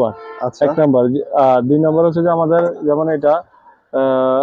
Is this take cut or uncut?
uncut